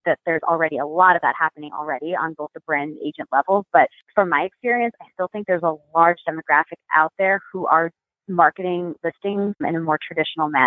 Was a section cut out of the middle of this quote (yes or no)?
yes